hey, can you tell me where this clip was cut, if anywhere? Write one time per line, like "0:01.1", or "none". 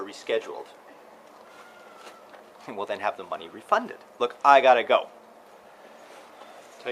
0:01.0
0:04.0